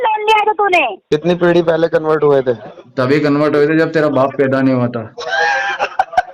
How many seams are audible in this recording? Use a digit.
1